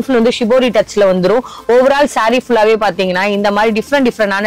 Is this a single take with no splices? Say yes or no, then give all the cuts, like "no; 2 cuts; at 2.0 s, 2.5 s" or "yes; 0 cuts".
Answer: yes; 0 cuts